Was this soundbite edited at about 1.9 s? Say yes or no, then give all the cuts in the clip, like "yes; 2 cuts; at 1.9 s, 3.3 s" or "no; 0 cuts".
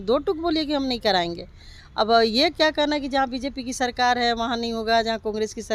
no; 0 cuts